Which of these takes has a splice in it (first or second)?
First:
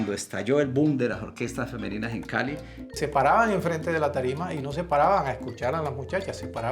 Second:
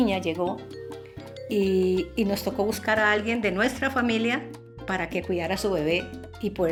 first